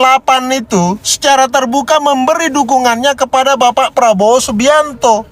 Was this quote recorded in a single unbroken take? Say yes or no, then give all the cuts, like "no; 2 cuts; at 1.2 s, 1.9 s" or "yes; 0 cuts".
yes; 0 cuts